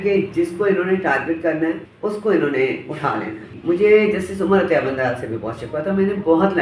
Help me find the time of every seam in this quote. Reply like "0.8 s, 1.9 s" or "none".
1.9 s, 3.5 s